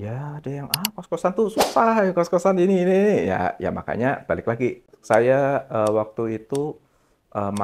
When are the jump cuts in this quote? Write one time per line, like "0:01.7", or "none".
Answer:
0:04.9